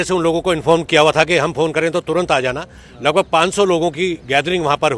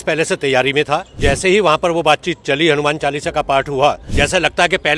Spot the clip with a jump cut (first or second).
second